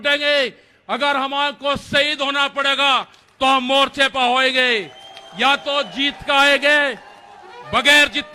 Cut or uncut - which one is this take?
uncut